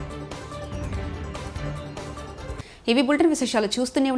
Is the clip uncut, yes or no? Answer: yes